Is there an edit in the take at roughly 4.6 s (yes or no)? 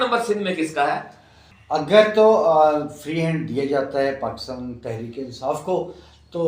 no